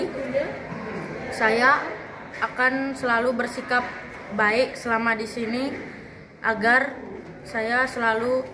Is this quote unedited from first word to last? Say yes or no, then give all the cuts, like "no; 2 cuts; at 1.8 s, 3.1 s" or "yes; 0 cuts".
yes; 0 cuts